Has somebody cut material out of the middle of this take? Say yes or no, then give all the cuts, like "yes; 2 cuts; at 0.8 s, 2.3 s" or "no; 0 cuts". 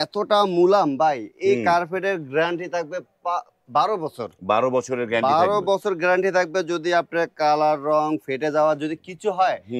no; 0 cuts